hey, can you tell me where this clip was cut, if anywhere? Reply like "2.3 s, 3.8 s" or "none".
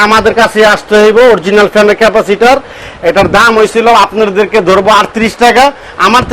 none